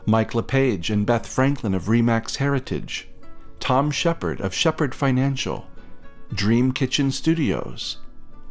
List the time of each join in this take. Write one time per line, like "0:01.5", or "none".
none